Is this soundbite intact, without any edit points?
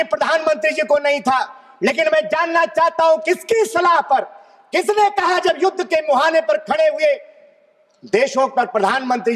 yes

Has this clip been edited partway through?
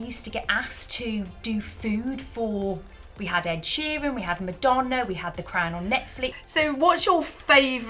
yes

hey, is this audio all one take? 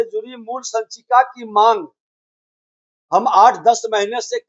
yes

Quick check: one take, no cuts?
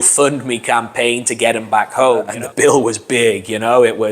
no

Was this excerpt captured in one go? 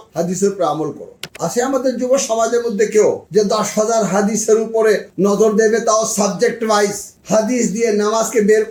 yes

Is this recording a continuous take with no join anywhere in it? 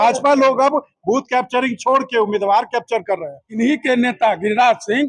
no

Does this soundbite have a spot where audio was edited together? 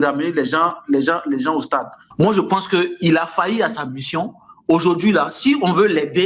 yes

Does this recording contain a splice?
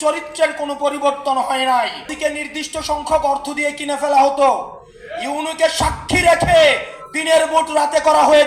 yes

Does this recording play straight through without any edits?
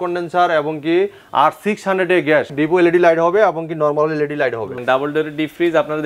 no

